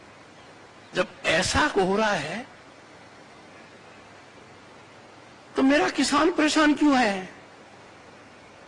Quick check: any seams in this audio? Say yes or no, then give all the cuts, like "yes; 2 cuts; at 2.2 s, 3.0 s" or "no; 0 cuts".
no; 0 cuts